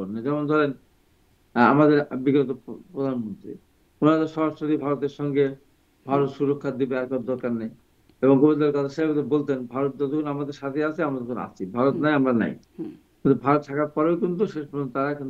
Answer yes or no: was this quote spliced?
no